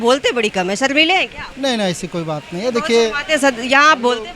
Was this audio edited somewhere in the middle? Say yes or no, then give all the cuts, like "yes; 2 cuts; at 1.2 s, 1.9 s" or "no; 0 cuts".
no; 0 cuts